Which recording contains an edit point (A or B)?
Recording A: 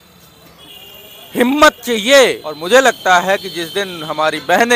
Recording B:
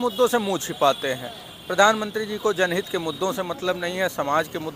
A